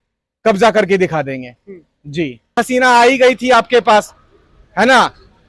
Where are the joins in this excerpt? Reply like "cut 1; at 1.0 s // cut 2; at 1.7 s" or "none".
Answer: cut 1; at 2.5 s